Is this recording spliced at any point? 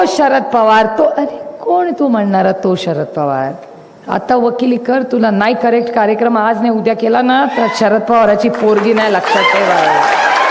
no; 0 cuts

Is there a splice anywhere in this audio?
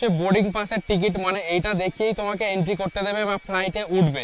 no; 0 cuts

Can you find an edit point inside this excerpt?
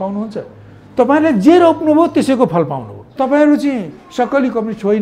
yes; 1 cut; at 3.1 s

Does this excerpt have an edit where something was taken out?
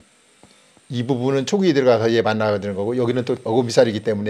yes; 1 cut; at 3.4 s

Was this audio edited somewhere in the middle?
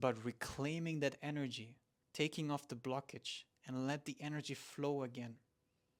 no; 0 cuts

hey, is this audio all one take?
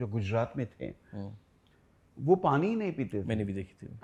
yes; 0 cuts

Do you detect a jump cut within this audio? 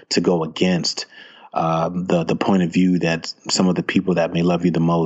no; 0 cuts

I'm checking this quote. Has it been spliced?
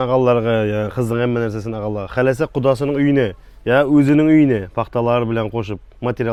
no; 0 cuts

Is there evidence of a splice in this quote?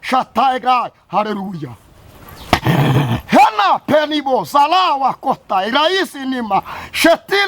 no; 0 cuts

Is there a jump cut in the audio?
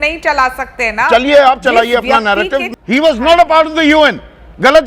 yes; 1 cut; at 2.7 s

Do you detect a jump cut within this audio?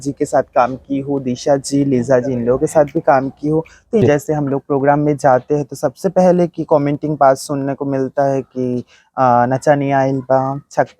yes; 1 cut; at 4.0 s

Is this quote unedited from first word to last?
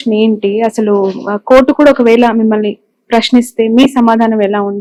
yes; 0 cuts

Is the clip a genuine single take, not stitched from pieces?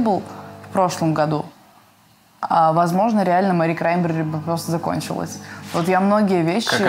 yes; 0 cuts

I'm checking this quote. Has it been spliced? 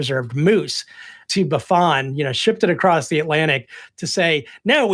no; 0 cuts

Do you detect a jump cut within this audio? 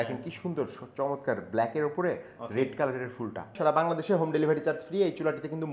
yes; 1 cut; at 3.5 s

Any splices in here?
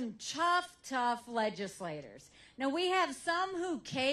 no; 0 cuts

